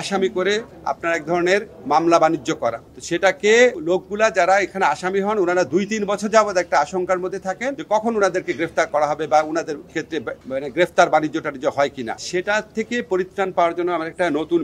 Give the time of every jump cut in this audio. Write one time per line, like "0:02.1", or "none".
0:03.8